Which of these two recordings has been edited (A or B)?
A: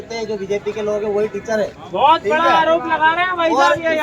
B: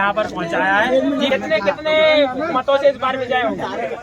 B